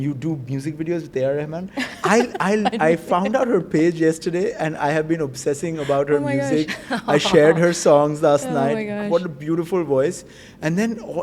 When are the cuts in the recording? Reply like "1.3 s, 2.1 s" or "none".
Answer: none